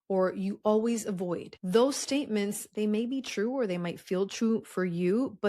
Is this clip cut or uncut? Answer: cut